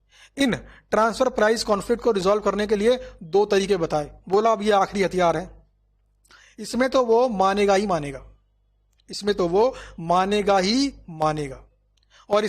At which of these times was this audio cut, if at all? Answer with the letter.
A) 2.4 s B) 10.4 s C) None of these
C